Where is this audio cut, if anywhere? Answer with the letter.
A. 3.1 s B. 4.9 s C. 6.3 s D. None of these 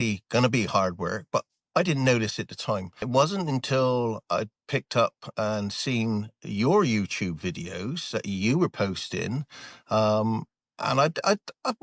A